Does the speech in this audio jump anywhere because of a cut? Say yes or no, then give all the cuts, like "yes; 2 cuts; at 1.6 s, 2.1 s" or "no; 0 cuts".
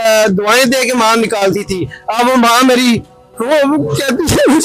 no; 0 cuts